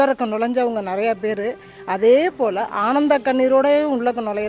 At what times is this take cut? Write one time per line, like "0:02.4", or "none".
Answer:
none